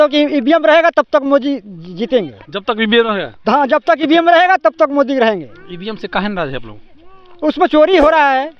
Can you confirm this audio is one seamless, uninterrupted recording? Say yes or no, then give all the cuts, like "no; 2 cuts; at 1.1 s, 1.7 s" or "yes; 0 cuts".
yes; 0 cuts